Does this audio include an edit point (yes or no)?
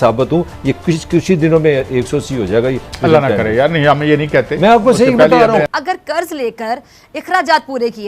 yes